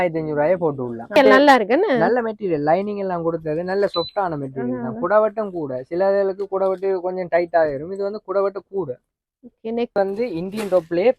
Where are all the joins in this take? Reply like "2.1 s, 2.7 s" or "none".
1.2 s, 9.9 s